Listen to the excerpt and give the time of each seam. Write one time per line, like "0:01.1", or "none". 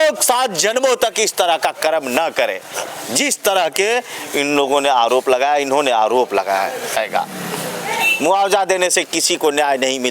0:07.0